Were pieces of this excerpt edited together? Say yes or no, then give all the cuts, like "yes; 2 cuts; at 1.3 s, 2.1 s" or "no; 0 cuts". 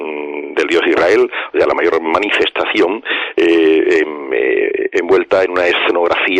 yes; 1 cut; at 3.1 s